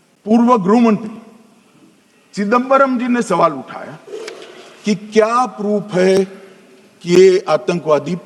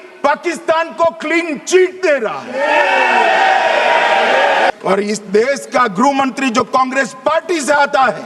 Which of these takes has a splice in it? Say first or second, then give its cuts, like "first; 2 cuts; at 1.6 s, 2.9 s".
second; 1 cut; at 4.7 s